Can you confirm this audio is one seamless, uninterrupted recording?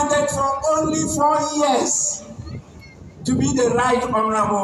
yes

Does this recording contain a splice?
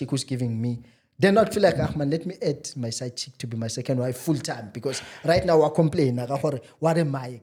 no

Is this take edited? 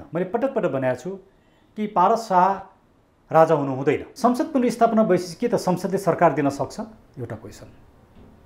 yes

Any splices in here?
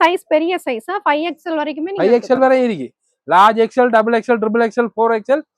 no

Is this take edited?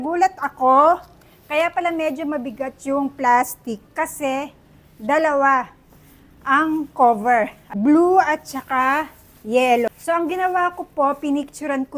yes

